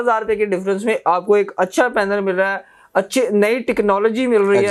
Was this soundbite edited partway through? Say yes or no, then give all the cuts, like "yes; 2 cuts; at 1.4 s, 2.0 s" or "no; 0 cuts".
no; 0 cuts